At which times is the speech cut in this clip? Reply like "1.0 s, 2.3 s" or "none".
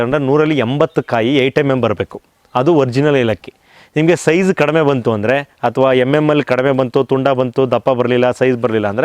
none